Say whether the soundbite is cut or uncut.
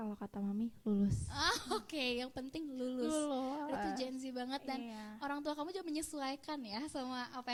uncut